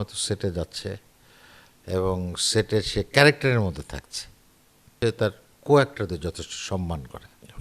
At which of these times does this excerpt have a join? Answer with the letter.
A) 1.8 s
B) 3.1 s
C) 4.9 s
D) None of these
C